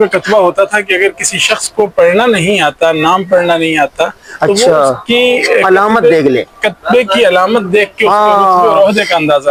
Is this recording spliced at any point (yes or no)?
no